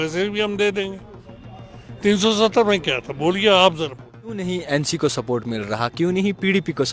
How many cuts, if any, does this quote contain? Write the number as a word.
one